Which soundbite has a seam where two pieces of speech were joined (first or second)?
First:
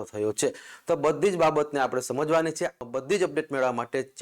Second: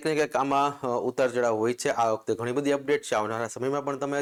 first